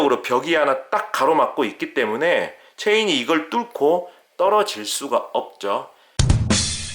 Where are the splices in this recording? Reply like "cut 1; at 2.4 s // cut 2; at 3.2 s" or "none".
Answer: cut 1; at 6.0 s